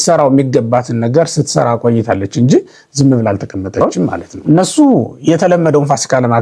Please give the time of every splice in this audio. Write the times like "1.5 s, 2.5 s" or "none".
3.8 s